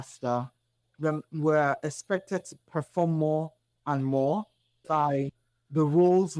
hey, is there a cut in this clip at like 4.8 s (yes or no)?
yes